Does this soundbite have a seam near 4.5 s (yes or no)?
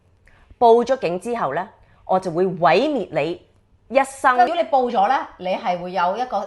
yes